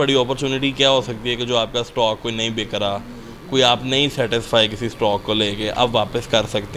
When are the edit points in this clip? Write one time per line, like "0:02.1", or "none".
none